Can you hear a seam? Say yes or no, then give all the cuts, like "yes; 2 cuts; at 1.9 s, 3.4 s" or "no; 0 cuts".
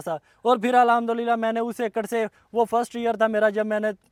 no; 0 cuts